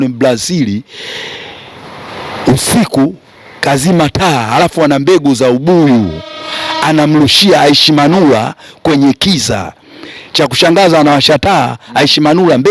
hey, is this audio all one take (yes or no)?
yes